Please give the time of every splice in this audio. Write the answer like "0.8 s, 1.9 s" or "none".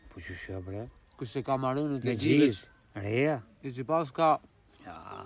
none